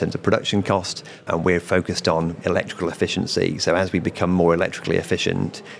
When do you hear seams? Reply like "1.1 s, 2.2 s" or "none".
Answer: 1.2 s, 2.4 s